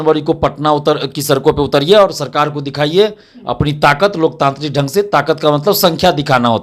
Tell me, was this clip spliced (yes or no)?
no